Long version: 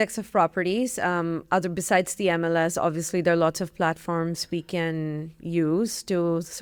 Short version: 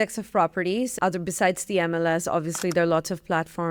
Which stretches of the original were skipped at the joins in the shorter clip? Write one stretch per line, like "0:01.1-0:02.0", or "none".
0:00.9-0:01.4